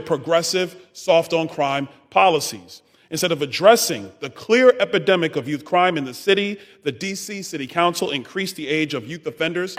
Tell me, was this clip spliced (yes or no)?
no